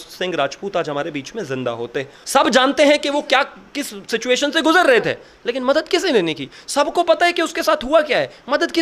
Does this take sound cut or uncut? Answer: cut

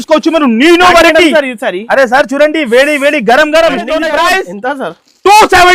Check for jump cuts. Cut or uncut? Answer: cut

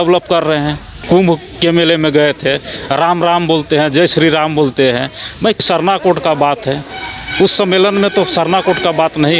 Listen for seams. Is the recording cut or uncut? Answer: cut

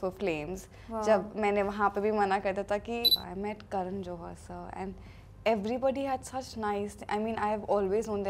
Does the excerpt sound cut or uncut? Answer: cut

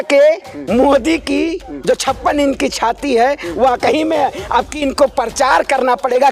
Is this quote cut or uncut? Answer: uncut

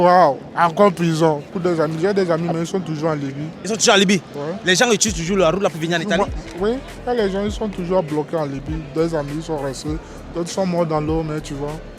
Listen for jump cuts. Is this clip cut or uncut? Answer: cut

